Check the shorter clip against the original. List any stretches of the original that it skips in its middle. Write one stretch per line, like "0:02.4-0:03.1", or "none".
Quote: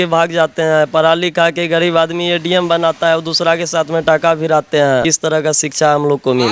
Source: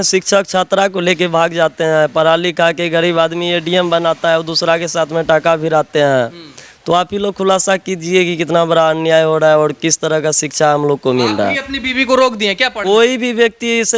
0:06.2-0:09.8